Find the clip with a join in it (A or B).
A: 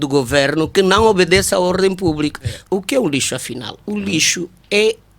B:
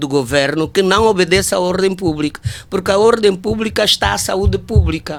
A